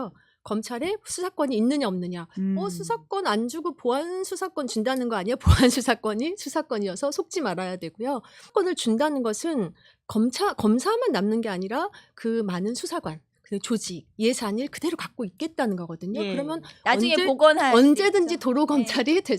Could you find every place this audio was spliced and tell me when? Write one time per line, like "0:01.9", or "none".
0:08.5